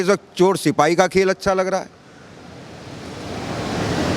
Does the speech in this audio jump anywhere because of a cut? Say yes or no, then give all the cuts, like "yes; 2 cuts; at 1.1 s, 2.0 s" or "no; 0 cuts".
no; 0 cuts